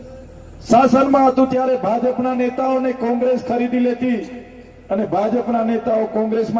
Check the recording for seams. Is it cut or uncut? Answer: uncut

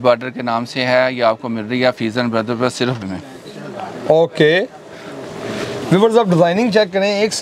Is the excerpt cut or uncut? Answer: cut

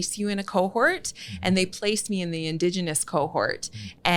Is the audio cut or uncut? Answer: uncut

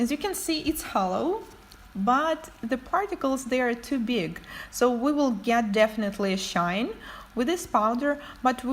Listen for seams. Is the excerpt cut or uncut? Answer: cut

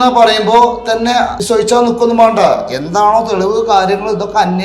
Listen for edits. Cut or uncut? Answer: cut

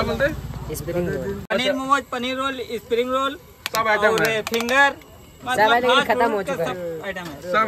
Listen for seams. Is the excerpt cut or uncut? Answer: cut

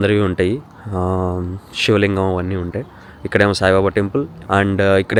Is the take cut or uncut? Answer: uncut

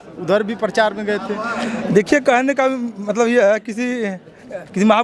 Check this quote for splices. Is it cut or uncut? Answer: uncut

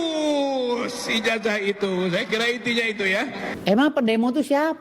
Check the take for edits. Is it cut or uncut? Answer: uncut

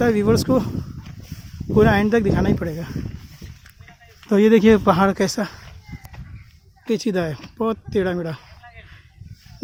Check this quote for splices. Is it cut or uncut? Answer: uncut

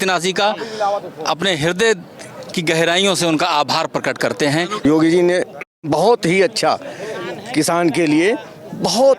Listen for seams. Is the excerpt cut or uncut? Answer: cut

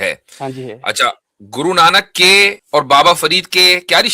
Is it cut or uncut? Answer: cut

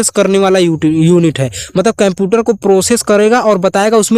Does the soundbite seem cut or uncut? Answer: uncut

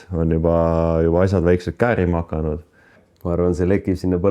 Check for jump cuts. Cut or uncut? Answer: cut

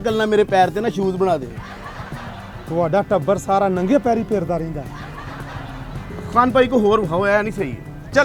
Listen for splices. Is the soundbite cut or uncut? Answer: uncut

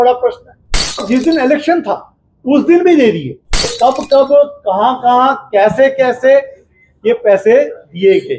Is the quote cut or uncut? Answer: cut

